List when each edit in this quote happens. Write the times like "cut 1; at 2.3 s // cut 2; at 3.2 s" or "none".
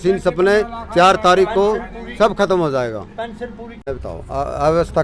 cut 1; at 3.8 s